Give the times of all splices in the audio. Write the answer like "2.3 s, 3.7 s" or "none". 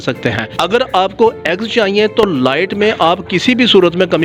none